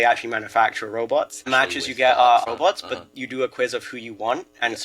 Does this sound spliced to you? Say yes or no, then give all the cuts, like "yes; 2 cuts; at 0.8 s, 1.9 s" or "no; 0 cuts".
yes; 2 cuts; at 1.5 s, 2.4 s